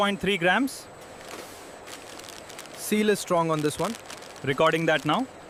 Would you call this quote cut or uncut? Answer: uncut